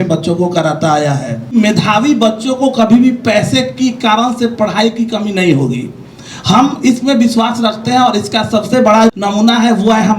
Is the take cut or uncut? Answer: cut